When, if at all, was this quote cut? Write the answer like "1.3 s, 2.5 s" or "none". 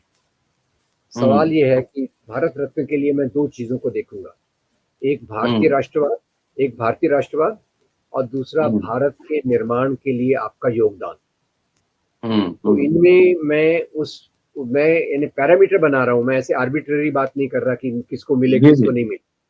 none